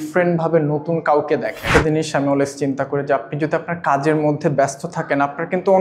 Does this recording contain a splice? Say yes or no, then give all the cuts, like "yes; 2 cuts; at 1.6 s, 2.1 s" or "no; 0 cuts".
yes; 1 cut; at 1.7 s